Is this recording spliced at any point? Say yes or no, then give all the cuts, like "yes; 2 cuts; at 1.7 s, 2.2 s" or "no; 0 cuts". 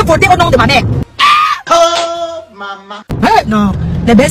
yes; 1 cut; at 0.9 s